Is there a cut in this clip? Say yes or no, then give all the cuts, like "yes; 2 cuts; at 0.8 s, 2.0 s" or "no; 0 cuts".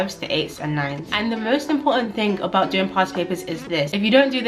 yes; 1 cut; at 1.0 s